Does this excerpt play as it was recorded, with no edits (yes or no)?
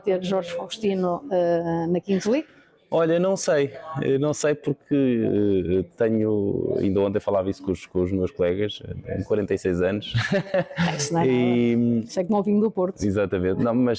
yes